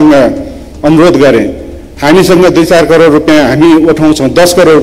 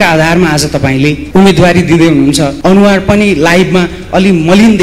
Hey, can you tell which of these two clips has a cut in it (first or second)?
second